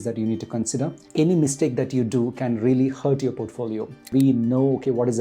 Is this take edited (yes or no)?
yes